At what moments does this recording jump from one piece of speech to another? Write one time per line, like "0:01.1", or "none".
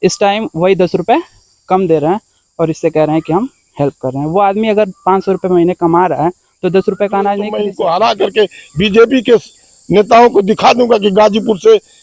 0:07.6